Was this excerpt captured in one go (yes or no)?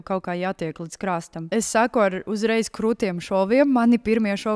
no